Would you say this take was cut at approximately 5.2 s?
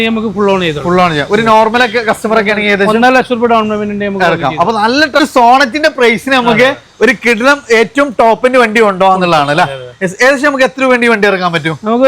yes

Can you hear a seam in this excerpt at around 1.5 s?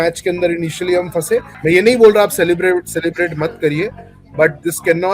yes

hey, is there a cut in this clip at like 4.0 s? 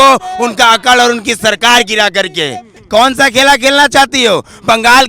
no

